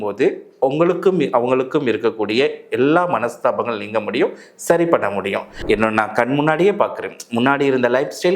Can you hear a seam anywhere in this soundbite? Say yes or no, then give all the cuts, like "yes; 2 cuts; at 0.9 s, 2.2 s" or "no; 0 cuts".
yes; 1 cut; at 5.5 s